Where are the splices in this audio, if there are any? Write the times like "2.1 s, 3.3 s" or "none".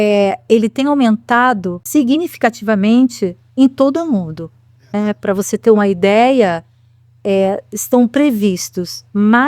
1.8 s